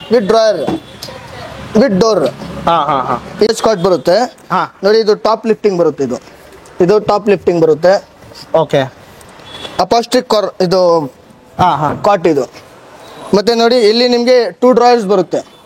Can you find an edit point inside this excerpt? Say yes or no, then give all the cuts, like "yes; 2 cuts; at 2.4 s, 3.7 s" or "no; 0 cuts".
yes; 1 cut; at 3.5 s